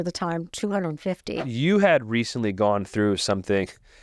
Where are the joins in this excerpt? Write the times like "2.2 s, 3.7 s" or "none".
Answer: 1.3 s